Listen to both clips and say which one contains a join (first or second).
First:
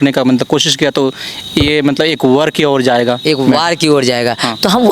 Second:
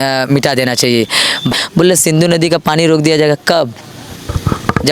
second